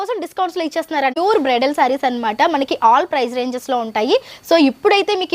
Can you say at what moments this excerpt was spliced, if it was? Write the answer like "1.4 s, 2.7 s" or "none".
1.2 s